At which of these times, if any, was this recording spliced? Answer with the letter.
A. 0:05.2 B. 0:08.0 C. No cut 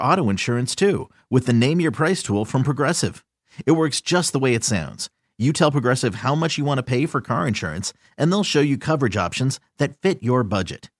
C